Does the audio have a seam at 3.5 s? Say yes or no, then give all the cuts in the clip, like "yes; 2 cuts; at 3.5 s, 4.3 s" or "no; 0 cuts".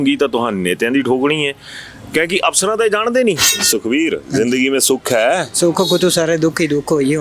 yes; 1 cut; at 3.5 s